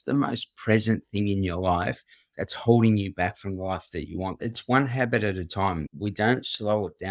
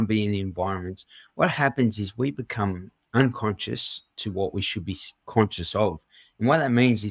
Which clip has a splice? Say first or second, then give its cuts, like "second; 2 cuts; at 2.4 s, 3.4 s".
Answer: first; 2 cuts; at 4.5 s, 5.9 s